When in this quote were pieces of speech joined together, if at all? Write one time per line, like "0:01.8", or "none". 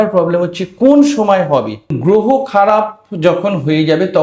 0:01.9